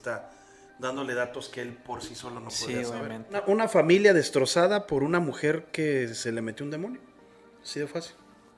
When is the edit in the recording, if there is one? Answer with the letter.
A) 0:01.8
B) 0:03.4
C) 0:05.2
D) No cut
B